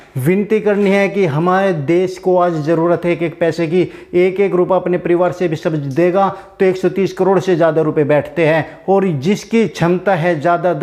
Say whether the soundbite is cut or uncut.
uncut